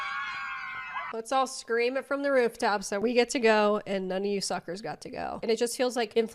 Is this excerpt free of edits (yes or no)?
no